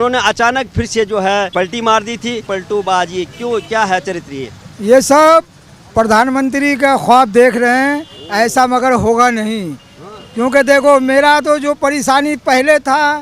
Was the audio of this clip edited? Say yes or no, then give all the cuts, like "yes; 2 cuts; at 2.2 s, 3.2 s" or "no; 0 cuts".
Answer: yes; 1 cut; at 2.4 s